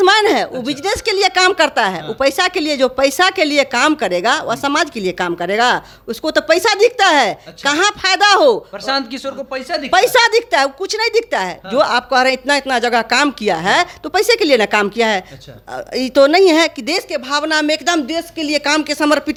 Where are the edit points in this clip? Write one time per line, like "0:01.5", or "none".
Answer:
none